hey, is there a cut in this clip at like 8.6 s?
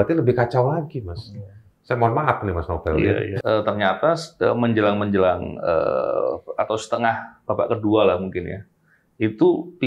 no; 1 cut; at 3.3 s

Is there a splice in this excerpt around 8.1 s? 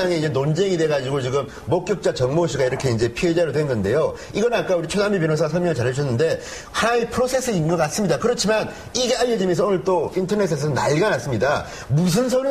yes; 1 cut; at 8.1 s

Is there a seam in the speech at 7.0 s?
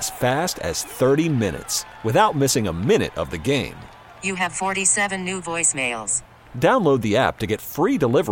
no; 0 cuts

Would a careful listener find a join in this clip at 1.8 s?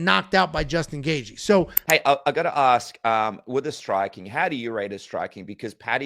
yes; 1 cut; at 1.8 s

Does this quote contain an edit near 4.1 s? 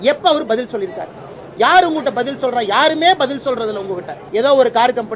yes; 1 cut; at 4.1 s

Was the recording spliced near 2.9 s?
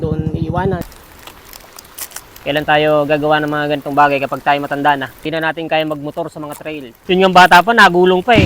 no; 3 cuts; at 0.8 s, 5.1 s, 6.9 s

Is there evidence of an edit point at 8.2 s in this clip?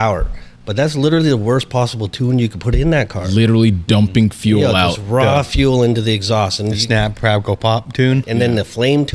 yes; 1 cut; at 8.2 s

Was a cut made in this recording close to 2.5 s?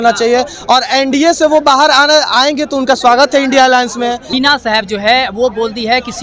no; 1 cut; at 4.3 s

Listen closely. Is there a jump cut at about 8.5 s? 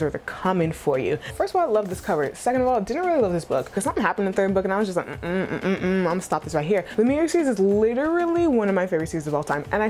no; 3 cuts; at 1.3 s, 3.7 s, 6.9 s

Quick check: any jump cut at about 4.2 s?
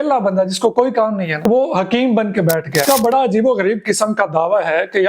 no; 2 cuts; at 1.3 s, 2.8 s

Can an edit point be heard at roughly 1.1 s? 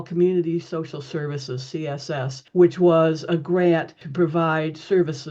no; 2 cuts; at 2.4 s, 4.0 s

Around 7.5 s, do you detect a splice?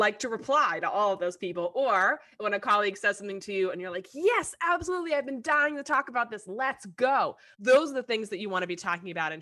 yes; 1 cut; at 7.5 s

